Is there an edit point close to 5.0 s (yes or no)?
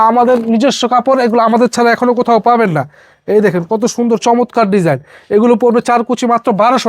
no